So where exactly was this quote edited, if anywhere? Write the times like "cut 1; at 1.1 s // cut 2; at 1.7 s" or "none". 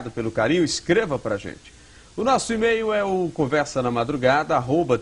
none